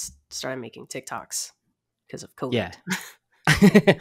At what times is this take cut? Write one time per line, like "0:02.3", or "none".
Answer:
none

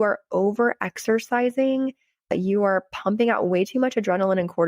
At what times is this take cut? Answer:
0:02.3

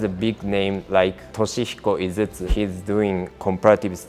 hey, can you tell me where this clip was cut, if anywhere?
0:01.2
0:02.5

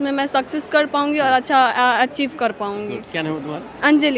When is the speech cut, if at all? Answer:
none

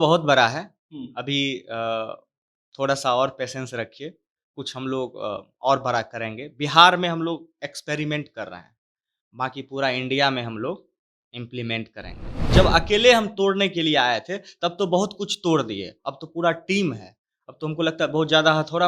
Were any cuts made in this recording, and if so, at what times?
0:12.3

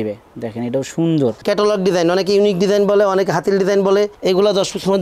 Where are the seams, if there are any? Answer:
0:01.4

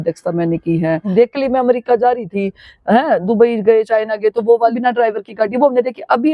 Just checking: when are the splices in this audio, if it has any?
0:01.0
0:04.8

